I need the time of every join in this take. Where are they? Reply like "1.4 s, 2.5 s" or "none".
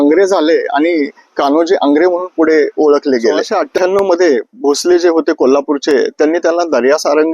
3.6 s